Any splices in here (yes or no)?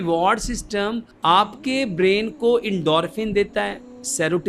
yes